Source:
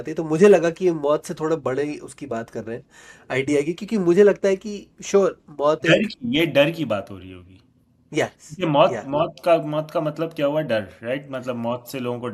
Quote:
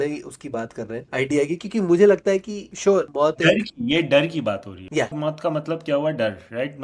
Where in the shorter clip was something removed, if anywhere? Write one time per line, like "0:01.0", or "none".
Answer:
0:01.0
0:02.9
0:05.1